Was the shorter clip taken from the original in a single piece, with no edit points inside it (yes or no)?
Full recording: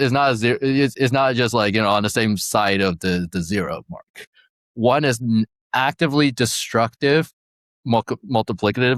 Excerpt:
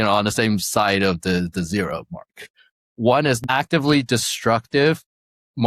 no